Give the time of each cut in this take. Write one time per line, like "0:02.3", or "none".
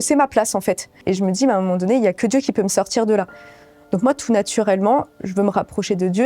0:01.0